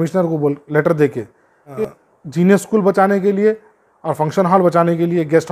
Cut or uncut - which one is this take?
cut